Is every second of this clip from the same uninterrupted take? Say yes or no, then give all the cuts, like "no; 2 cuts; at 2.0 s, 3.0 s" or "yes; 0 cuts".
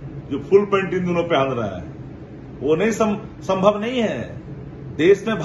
yes; 0 cuts